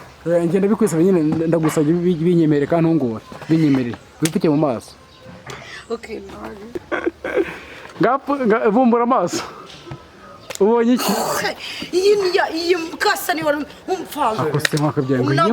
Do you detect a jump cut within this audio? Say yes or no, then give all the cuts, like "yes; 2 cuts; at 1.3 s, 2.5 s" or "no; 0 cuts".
yes; 1 cut; at 6.8 s